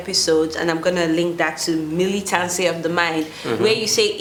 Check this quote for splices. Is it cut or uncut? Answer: uncut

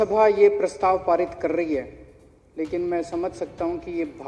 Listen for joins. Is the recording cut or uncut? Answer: uncut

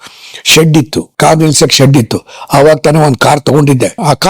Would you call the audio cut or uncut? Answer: cut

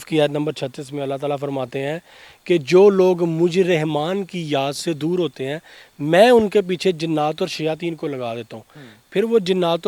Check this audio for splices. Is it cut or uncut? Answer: uncut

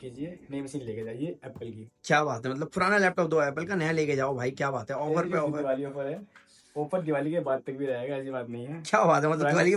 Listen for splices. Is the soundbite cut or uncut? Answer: uncut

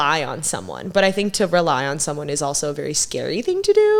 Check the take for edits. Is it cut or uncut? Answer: uncut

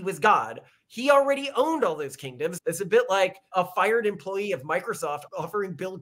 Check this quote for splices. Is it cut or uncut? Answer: cut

